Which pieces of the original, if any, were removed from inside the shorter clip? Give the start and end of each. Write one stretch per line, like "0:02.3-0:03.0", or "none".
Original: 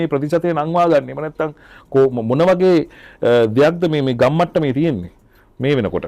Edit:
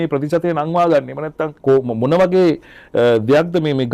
0:01.5-0:01.7